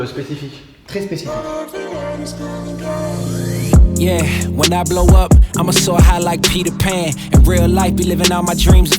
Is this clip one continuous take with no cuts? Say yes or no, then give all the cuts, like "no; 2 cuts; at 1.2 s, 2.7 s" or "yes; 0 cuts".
no; 1 cut; at 1.2 s